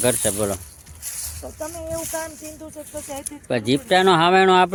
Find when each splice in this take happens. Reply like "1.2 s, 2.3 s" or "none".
none